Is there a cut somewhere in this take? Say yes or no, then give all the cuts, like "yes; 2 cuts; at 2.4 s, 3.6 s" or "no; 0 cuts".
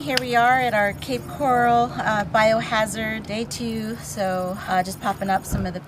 yes; 2 cuts; at 3.3 s, 4.6 s